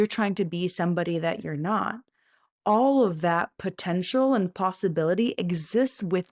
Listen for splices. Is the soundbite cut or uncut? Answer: uncut